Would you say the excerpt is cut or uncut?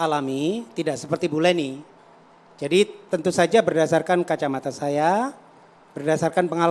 uncut